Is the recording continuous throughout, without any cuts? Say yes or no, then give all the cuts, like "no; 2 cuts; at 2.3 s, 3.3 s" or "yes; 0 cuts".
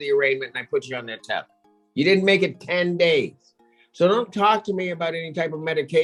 yes; 0 cuts